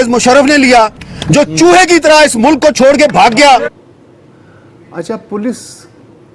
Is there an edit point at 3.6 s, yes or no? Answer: yes